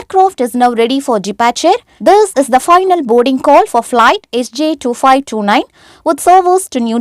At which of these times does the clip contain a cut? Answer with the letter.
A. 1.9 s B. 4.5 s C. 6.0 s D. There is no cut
A